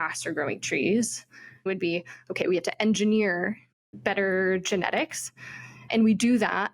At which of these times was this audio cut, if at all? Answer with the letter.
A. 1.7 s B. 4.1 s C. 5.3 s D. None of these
A